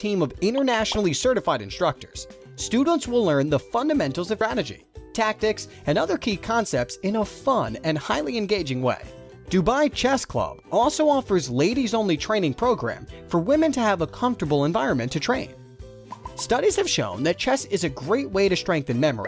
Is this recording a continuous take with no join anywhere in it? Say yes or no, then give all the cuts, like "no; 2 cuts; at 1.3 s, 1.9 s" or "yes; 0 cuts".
no; 1 cut; at 4.4 s